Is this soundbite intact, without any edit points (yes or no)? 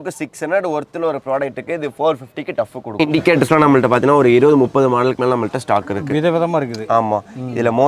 no